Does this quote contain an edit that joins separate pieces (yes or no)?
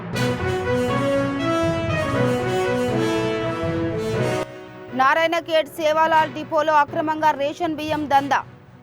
yes